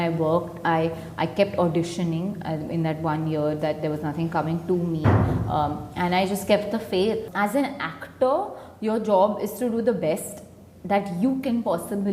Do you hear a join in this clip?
yes; 1 cut; at 7.3 s

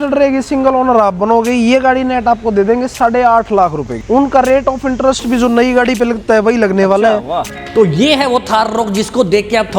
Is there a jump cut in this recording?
yes; 2 cuts; at 4.0 s, 7.5 s

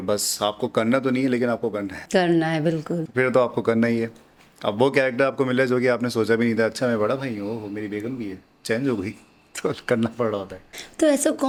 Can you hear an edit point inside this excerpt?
no; 0 cuts

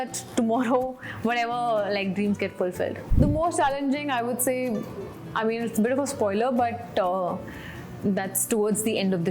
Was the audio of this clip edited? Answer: yes; 1 cut; at 3.1 s

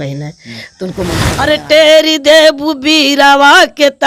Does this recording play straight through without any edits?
no; 1 cut; at 1.2 s

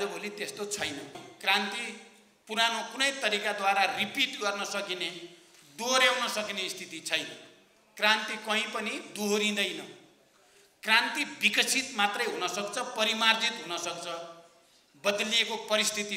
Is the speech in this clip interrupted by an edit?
yes; 1 cut; at 1.2 s

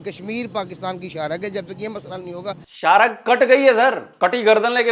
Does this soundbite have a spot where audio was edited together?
yes; 2 cuts; at 2.7 s, 4.1 s

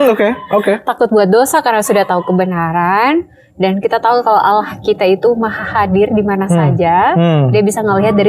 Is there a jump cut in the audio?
no; 0 cuts

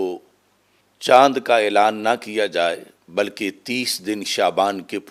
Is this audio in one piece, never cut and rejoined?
yes; 0 cuts

